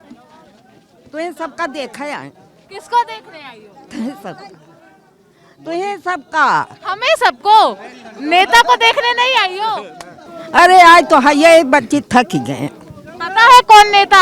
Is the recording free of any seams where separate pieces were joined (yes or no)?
no